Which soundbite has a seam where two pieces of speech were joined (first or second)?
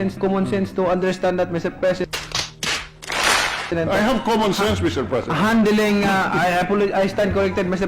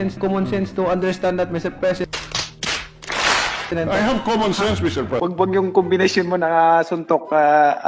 second